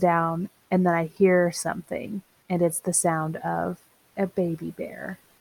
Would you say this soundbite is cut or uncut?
uncut